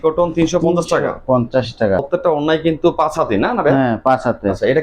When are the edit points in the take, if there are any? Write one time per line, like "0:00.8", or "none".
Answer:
0:02.1